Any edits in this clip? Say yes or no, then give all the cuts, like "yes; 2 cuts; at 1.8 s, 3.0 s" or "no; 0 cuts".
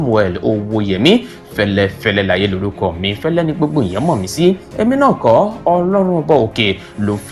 no; 0 cuts